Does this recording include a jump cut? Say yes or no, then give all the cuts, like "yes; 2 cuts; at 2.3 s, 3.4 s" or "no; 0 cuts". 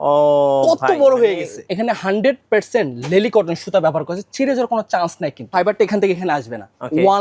yes; 2 cuts; at 1.7 s, 5.4 s